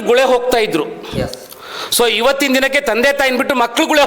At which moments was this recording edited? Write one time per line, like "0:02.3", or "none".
none